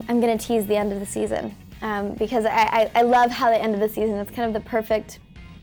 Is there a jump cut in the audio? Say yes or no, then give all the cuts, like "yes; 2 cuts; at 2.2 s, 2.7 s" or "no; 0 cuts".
no; 0 cuts